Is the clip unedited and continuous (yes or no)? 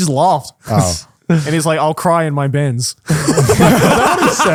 yes